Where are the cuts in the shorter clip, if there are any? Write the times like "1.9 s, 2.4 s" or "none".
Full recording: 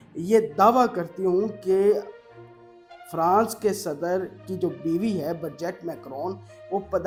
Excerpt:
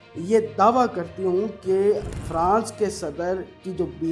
2.2 s

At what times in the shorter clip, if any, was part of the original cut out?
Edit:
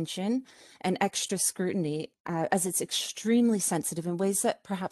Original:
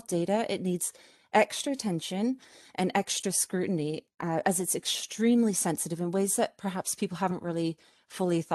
none

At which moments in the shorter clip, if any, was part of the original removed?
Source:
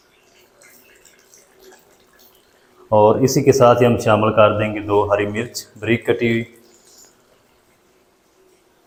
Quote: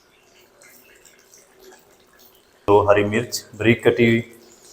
2.6 s

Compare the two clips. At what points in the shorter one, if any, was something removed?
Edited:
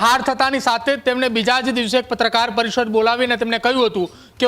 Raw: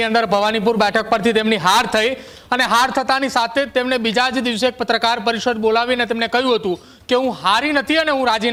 none

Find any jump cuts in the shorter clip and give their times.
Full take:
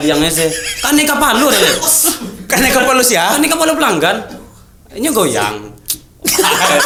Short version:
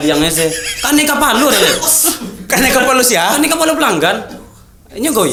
none

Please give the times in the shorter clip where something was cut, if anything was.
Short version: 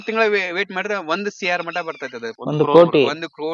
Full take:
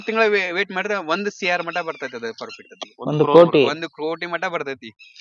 2.4 s

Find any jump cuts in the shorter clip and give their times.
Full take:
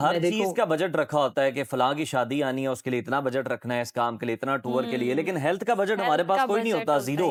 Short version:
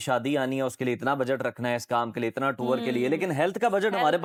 none

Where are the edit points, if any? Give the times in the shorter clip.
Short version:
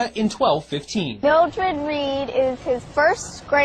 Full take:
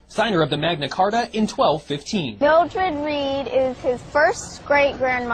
none

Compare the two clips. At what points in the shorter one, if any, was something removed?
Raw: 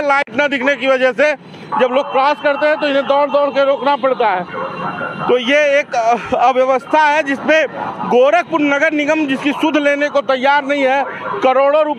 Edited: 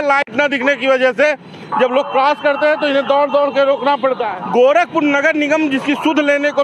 4.3 s

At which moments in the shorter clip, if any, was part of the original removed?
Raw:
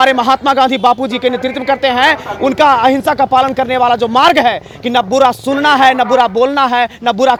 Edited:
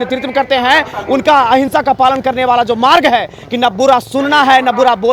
none

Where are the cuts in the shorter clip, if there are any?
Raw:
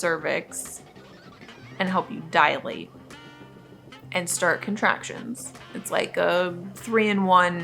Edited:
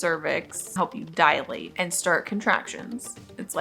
0.8 s, 1.7 s

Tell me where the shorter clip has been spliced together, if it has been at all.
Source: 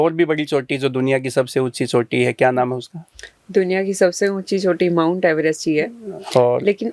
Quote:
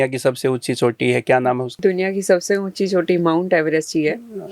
1.7 s

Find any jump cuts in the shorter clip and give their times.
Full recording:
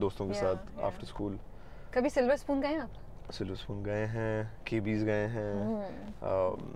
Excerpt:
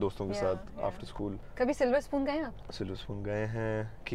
1.4 s, 2.6 s

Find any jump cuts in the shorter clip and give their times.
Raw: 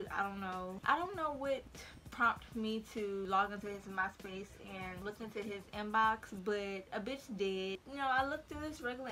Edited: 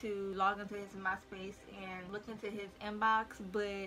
none

